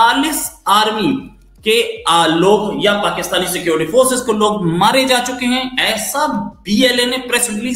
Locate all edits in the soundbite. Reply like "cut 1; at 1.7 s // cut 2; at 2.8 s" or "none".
none